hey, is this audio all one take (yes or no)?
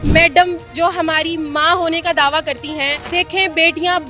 no